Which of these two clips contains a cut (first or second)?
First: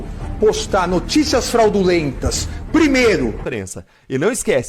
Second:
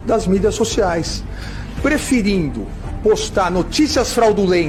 first